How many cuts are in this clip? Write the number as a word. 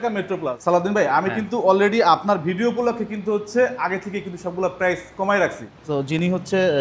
two